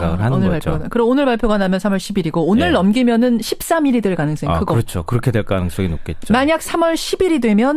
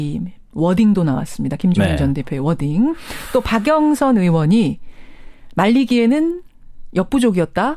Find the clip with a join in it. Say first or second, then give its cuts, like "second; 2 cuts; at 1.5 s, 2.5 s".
second; 1 cut; at 1.4 s